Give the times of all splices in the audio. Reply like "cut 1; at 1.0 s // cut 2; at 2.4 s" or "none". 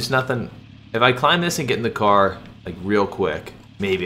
none